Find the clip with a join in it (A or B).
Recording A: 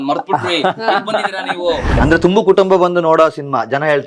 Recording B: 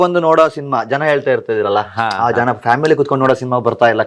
A